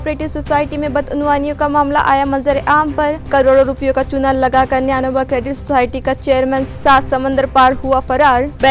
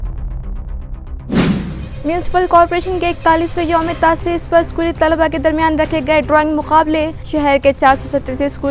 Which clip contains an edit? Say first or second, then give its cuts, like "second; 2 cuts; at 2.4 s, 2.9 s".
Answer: second; 1 cut; at 1.8 s